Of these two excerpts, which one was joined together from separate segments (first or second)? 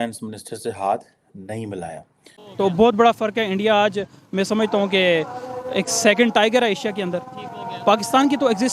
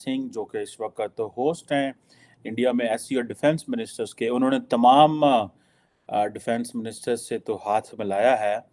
first